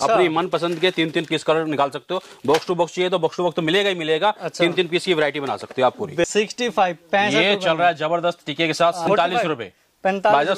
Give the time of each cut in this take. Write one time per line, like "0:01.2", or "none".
0:06.2
0:09.1